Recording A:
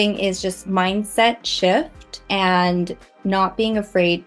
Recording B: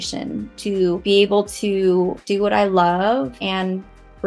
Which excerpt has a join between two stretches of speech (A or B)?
B